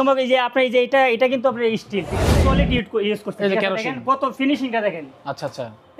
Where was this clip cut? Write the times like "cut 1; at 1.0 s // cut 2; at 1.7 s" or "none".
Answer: cut 1; at 2.3 s